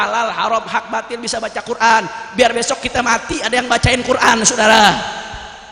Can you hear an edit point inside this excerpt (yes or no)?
no